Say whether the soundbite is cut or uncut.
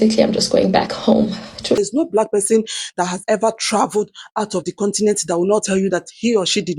cut